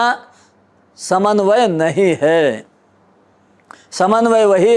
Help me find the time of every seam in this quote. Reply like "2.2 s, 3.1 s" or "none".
none